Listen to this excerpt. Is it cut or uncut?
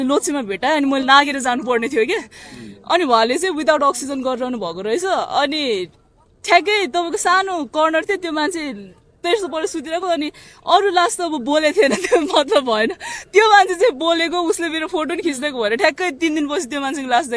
uncut